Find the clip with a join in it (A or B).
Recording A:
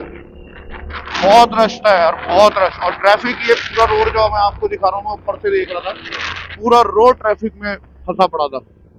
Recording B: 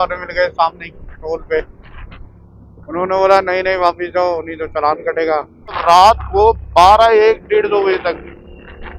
B